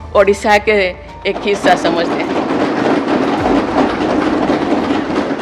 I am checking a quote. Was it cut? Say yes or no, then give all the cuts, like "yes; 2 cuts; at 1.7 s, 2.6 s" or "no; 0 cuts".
no; 0 cuts